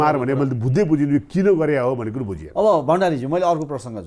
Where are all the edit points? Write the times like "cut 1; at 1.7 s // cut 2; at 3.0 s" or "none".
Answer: none